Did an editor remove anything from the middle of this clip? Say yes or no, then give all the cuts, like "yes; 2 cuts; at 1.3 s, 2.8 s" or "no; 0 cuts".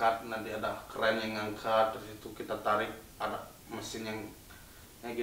no; 0 cuts